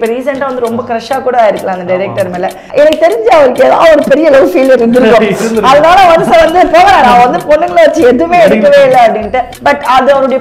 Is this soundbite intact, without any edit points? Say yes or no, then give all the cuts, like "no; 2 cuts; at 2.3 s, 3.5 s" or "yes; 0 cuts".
no; 2 cuts; at 2.6 s, 9.5 s